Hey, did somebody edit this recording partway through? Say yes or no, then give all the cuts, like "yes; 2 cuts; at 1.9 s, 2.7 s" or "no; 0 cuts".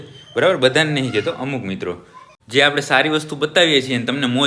no; 0 cuts